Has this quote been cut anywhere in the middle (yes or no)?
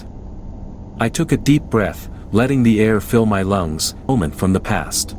yes